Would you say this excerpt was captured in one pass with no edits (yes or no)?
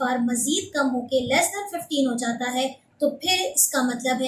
yes